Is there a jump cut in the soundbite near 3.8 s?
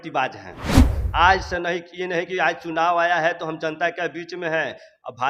no; 1 cut; at 1.0 s

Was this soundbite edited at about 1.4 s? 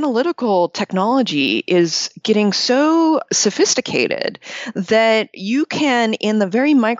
no; 0 cuts

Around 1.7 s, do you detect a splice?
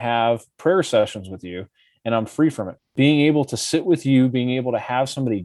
no; 1 cut; at 2.9 s

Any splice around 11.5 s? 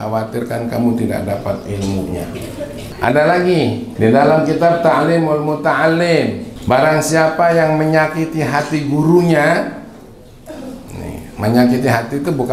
no; 3 cuts; at 2.9 s, 3.9 s, 6.5 s

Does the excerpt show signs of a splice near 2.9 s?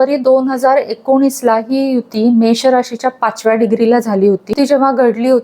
no; 1 cut; at 4.5 s

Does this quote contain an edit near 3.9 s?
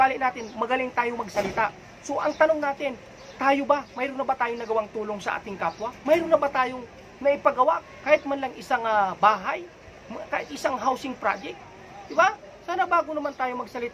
no; 1 cut; at 7.8 s

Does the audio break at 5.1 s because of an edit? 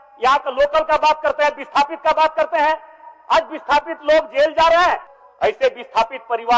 yes; 1 cut; at 5.1 s

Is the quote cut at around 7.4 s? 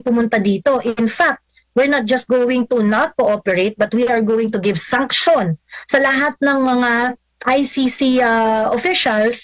no; 0 cuts

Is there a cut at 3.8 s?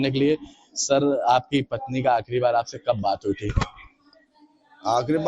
no; 1 cut; at 1.0 s

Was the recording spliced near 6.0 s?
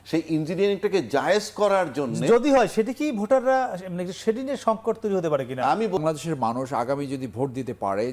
yes; 1 cut; at 6.0 s

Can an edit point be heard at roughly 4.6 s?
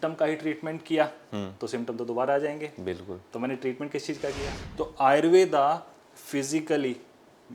yes; 1 cut; at 4.6 s

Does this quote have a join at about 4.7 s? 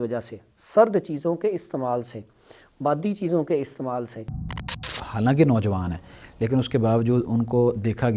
yes; 1 cut; at 4.7 s

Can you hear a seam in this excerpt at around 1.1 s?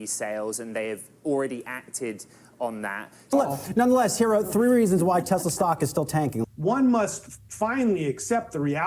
no; 2 cuts; at 3.1 s, 6.4 s

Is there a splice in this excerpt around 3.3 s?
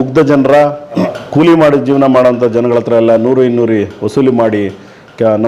no; 1 cut; at 1.1 s

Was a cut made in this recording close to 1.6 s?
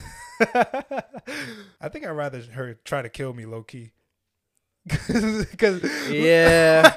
yes; 1 cut; at 1.6 s

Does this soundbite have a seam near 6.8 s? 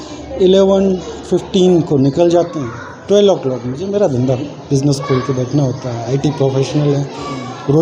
no; 0 cuts

